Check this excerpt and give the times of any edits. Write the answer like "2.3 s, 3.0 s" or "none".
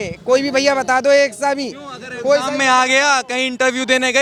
none